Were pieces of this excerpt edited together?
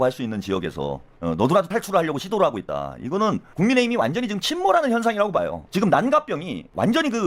yes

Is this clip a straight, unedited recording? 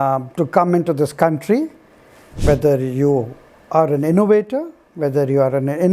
yes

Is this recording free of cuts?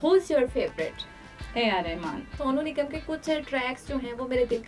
no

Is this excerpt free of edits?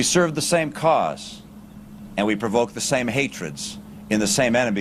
yes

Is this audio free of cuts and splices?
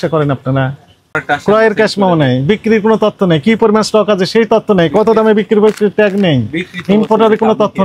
no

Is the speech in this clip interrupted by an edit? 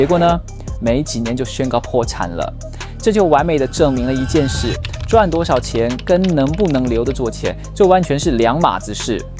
no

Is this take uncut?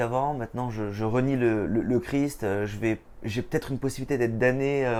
yes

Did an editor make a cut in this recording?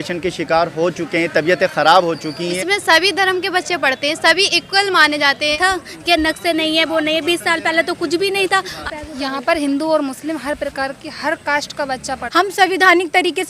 yes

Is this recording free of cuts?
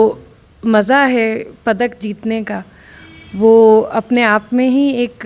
yes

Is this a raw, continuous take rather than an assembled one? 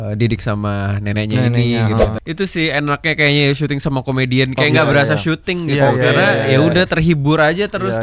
no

